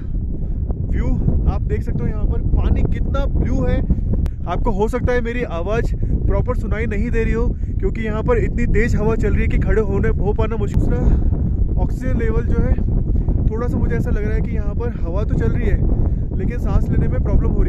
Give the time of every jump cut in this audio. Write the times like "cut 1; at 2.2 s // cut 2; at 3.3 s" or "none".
cut 1; at 4.3 s // cut 2; at 10.8 s